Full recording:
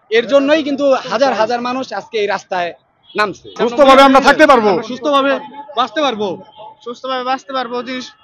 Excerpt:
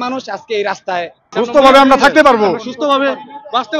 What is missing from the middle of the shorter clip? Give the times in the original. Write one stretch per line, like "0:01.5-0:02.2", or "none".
0:02.8-0:03.4